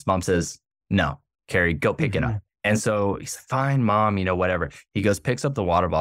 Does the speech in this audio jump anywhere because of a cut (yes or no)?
yes